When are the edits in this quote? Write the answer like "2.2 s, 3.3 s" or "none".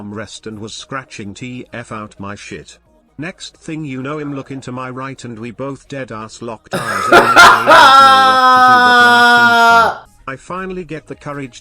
10.0 s